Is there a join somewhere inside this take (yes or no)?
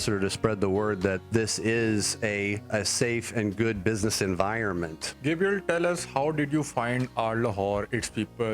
yes